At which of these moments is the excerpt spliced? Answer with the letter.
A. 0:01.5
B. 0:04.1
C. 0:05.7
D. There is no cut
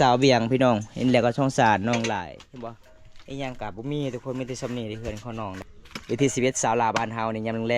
C